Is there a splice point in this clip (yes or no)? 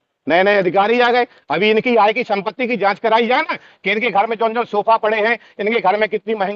no